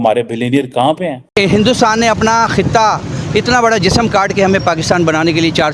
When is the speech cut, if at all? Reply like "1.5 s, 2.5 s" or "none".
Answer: 1.3 s